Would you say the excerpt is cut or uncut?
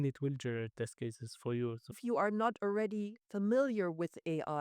cut